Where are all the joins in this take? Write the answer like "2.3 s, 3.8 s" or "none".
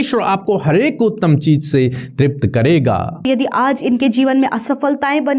3.2 s